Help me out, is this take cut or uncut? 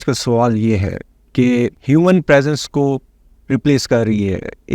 cut